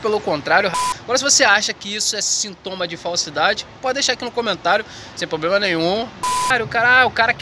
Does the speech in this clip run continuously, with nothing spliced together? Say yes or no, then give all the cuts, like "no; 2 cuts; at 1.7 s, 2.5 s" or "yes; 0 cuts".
no; 2 cuts; at 0.7 s, 6.2 s